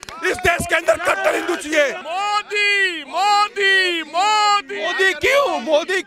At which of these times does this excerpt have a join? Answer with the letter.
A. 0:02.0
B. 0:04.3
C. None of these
C